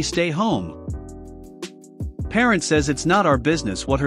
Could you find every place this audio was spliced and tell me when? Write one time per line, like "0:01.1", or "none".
0:01.0
0:02.3